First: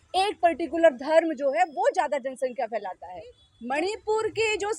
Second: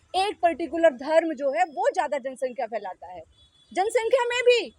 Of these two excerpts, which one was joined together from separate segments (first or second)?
first